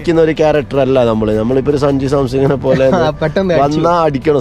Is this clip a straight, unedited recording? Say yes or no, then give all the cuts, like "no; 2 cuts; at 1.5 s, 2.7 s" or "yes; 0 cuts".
yes; 0 cuts